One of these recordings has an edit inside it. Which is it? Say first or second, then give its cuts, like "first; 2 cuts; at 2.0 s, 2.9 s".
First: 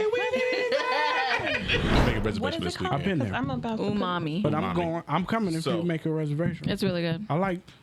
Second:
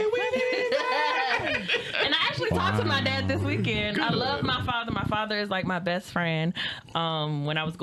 first; 1 cut; at 1.9 s